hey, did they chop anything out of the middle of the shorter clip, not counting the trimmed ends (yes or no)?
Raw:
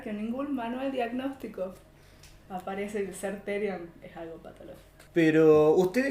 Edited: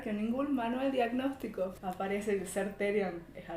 yes